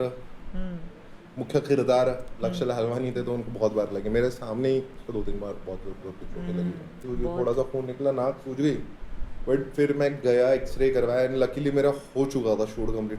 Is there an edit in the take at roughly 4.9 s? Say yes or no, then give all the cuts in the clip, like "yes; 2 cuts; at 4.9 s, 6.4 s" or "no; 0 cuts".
no; 1 cut; at 7.0 s